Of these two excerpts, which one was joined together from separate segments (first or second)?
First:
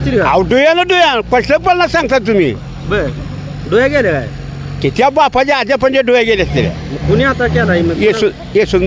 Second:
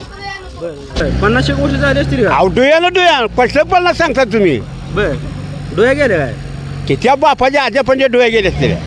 second